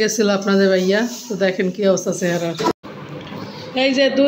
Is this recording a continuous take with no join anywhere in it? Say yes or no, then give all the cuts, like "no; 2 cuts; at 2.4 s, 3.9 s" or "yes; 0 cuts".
no; 1 cut; at 2.7 s